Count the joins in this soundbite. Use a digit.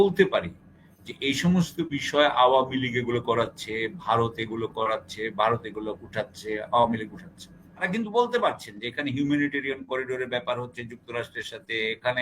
1